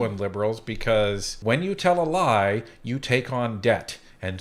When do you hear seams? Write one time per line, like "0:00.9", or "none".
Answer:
0:01.3